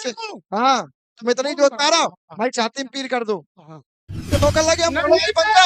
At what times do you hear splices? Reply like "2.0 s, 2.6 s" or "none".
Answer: 4.3 s